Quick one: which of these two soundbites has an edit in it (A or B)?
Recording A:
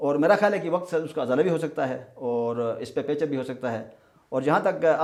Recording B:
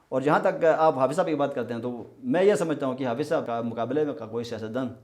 B